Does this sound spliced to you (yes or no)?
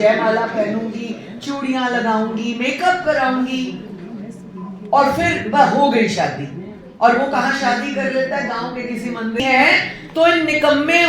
yes